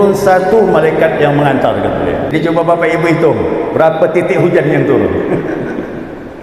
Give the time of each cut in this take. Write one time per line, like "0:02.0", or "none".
0:02.3